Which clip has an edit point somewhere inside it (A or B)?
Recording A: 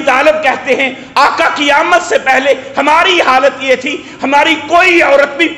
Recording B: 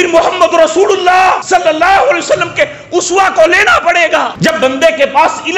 B